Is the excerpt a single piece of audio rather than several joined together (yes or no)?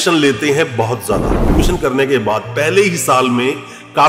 no